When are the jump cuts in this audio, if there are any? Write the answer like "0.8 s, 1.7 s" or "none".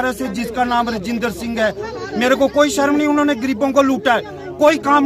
none